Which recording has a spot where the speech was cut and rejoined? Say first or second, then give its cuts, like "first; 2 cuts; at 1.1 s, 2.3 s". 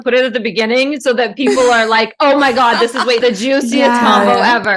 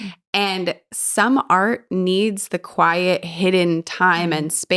first; 1 cut; at 3.2 s